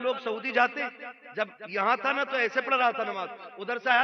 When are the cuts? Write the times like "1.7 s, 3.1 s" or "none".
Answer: none